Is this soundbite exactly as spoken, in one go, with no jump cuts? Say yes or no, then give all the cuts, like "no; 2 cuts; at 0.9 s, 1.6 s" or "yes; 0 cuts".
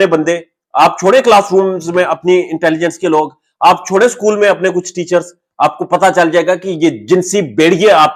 yes; 0 cuts